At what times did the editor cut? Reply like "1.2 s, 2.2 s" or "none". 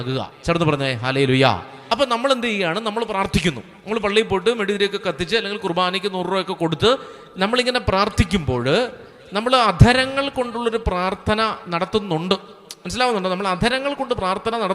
1.7 s